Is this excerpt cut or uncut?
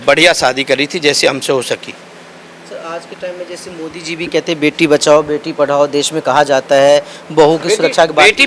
uncut